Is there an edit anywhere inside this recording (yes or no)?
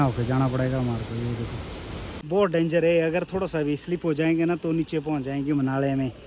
yes